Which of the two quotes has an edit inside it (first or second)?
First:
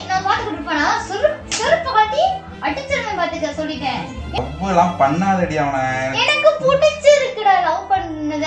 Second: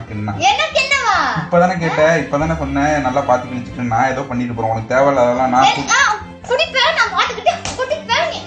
first